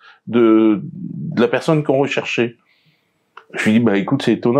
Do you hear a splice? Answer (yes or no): no